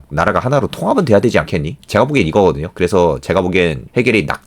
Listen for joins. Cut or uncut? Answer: uncut